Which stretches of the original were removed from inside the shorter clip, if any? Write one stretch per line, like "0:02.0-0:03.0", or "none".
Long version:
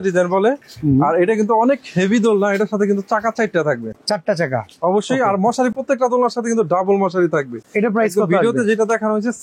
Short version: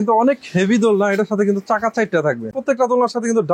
0:04.0-0:05.8